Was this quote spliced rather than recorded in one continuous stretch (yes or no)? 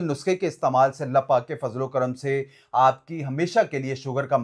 no